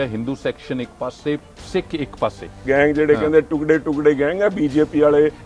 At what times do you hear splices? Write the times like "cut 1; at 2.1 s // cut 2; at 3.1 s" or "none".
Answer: cut 1; at 2.6 s